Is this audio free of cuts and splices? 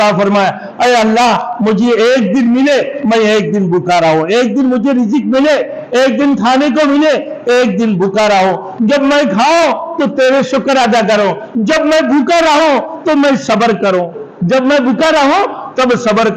yes; 0 cuts

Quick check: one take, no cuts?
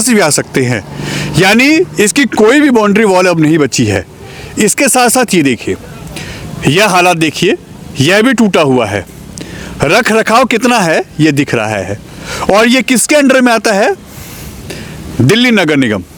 yes; 0 cuts

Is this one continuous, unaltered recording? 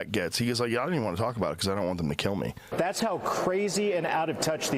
no; 1 cut; at 2.7 s

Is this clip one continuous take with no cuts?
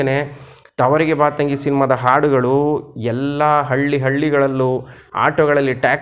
yes; 0 cuts

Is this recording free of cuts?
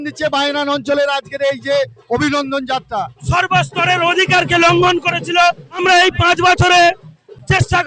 no; 2 cuts; at 3.2 s, 5.8 s

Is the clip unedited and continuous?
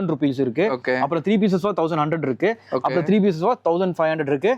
yes; 0 cuts

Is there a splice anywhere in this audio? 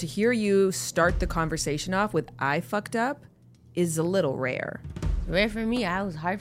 yes; 1 cut; at 5.2 s

